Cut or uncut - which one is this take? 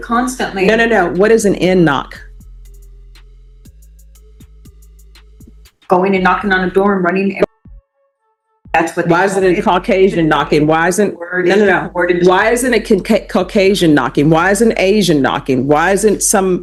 uncut